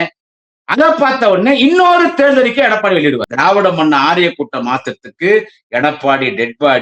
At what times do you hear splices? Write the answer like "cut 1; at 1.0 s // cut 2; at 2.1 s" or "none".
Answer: cut 1; at 3.3 s